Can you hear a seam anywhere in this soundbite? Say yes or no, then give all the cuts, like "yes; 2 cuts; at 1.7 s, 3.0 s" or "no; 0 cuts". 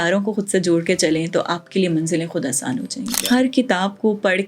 yes; 1 cut; at 3.1 s